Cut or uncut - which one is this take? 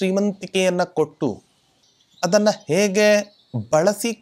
uncut